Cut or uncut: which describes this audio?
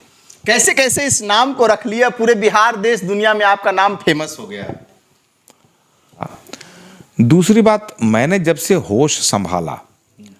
cut